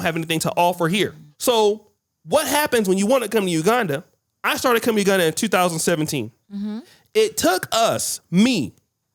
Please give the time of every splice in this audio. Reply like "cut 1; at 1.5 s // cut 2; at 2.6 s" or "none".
none